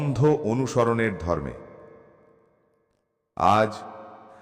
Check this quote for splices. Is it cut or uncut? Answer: uncut